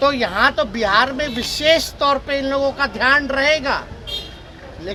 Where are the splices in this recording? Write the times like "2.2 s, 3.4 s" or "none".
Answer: none